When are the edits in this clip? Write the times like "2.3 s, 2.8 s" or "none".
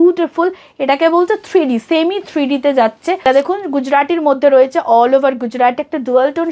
3.2 s